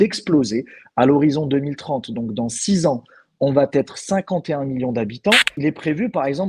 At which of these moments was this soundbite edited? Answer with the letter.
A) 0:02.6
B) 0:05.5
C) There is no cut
B